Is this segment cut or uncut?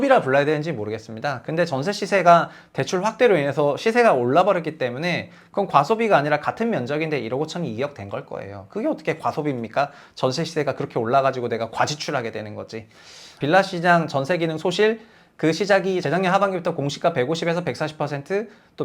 cut